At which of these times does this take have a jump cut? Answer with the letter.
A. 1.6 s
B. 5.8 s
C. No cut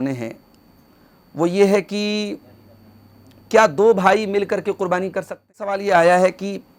B